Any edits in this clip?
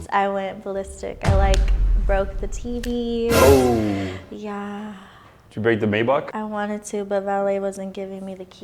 yes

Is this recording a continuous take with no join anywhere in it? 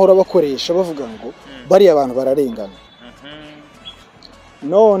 yes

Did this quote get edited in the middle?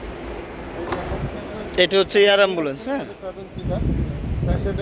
no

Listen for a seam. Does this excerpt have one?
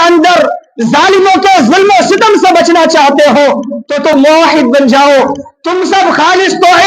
yes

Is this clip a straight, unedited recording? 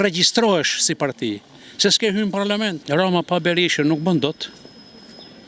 no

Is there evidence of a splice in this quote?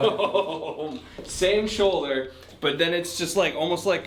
no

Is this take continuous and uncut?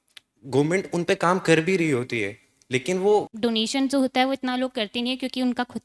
no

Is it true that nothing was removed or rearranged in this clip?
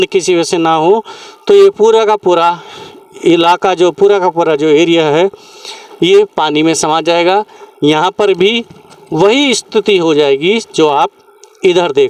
yes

